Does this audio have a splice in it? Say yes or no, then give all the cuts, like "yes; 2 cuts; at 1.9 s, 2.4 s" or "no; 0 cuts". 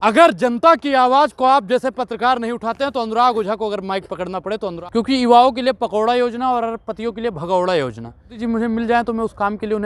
yes; 2 cuts; at 4.8 s, 8.4 s